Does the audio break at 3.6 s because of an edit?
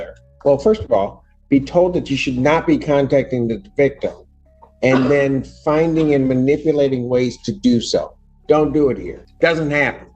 no; 1 cut; at 9.2 s

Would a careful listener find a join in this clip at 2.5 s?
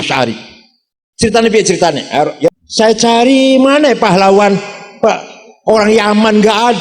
yes; 1 cut; at 2.5 s

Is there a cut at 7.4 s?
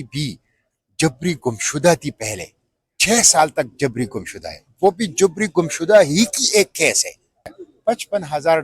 yes; 1 cut; at 7.4 s

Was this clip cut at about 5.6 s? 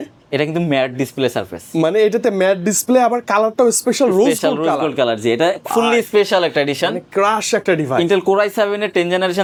no; 0 cuts

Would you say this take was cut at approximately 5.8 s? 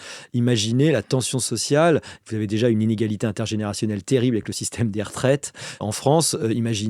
yes; 1 cut; at 5.8 s

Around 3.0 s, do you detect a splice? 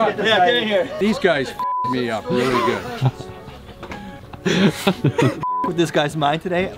no; 1 cut; at 0.9 s

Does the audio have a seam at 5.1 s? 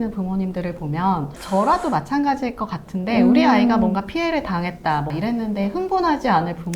yes; 1 cut; at 5.1 s

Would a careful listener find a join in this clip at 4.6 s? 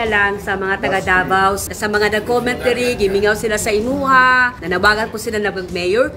yes; 2 cuts; at 1.6 s, 4.6 s

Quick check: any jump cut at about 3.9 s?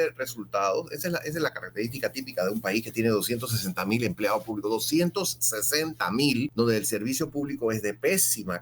no; 1 cut; at 6.5 s

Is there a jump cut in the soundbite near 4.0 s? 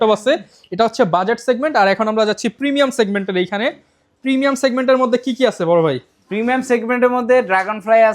no; 0 cuts

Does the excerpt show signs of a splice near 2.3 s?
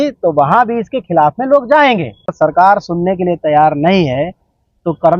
yes; 1 cut; at 2.3 s

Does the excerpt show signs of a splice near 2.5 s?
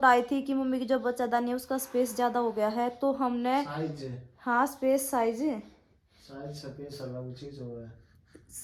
no; 0 cuts

